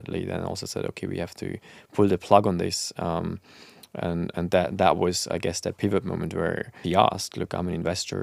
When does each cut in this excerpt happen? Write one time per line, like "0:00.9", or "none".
0:06.7